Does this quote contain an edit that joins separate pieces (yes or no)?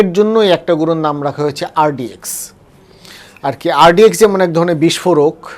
no